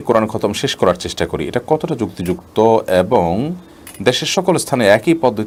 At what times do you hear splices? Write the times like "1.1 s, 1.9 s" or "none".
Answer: none